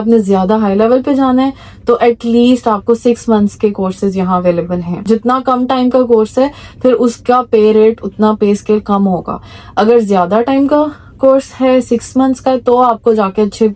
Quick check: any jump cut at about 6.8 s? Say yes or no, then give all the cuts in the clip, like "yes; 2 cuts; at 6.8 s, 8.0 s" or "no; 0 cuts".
no; 1 cut; at 5.0 s